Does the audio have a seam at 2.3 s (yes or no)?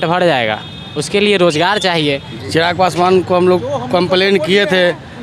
yes